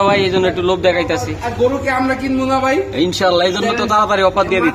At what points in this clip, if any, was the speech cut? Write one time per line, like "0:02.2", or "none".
none